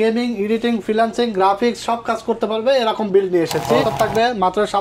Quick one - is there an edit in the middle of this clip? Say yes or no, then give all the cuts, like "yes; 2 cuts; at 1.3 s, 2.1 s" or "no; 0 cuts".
yes; 1 cut; at 3.9 s